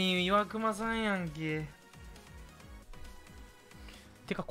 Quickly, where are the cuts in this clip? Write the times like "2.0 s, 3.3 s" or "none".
none

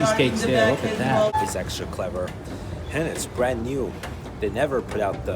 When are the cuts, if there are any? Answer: 1.3 s

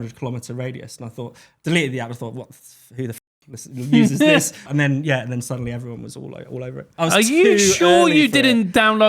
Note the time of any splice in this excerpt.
4.6 s, 6.8 s

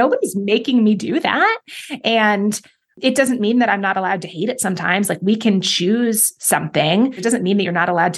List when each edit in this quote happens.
2.9 s, 7.2 s

